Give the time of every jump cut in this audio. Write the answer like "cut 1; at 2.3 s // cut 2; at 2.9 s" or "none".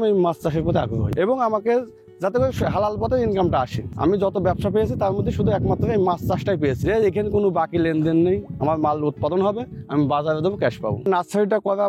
cut 1; at 1.1 s // cut 2; at 3.8 s // cut 3; at 11.1 s